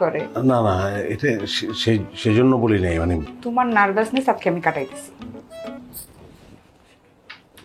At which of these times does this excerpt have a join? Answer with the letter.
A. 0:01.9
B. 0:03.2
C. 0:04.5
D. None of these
B